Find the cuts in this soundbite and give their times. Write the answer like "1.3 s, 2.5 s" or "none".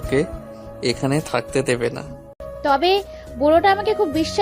2.5 s